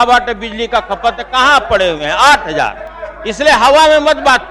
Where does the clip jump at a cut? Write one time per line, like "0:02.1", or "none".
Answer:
none